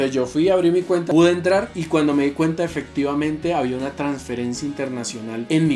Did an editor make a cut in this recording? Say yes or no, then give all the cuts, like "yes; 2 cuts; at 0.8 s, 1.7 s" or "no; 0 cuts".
no; 0 cuts